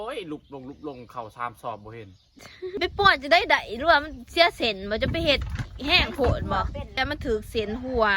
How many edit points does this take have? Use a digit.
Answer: 2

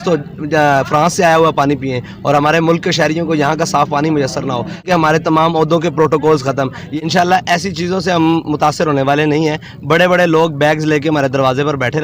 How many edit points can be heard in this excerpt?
2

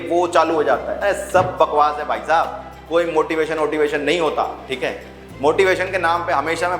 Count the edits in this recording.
1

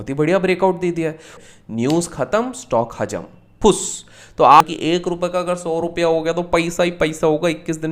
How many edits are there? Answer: 2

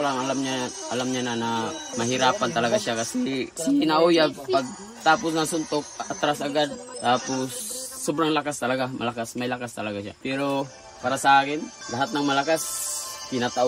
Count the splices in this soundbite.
5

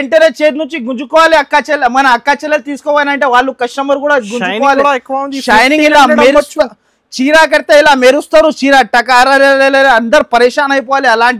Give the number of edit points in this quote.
0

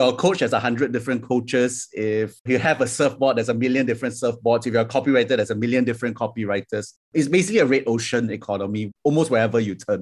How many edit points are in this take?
1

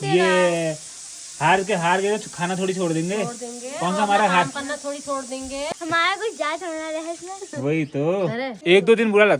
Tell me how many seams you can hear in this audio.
0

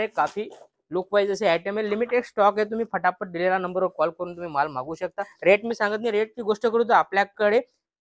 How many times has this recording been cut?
1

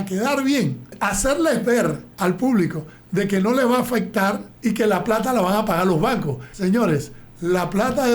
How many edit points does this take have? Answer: 4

